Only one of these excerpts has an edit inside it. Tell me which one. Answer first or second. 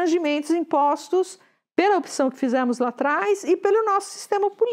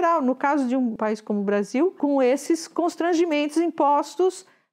second